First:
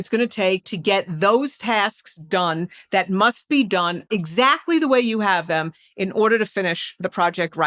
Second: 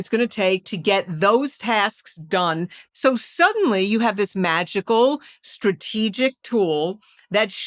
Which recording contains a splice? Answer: second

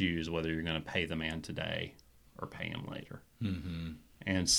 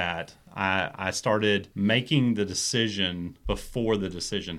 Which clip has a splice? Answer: second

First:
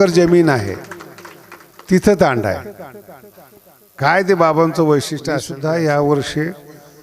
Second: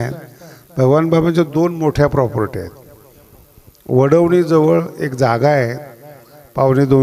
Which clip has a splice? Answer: first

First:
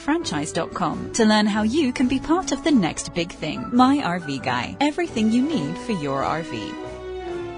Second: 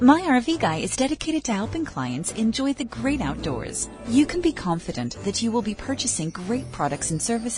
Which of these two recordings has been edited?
first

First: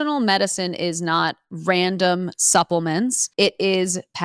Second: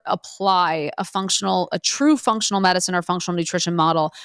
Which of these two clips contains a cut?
first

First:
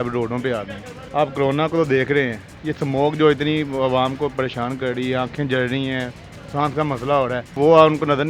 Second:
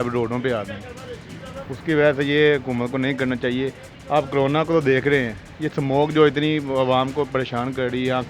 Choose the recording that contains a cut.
first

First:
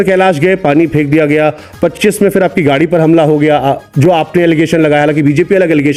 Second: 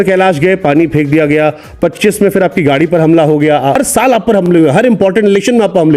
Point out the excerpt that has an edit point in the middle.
second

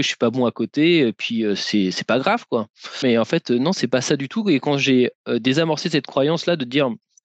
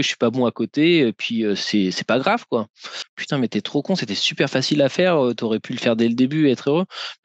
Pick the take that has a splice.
second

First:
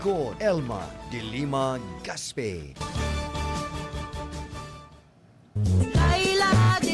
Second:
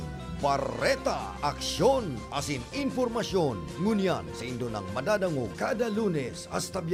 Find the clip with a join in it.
first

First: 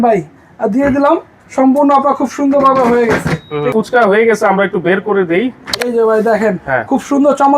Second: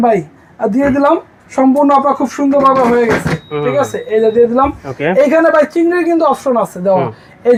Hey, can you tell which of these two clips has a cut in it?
first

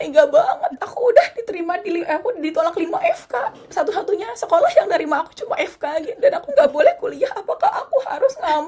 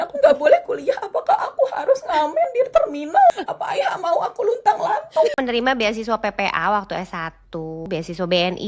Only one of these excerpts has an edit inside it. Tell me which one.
second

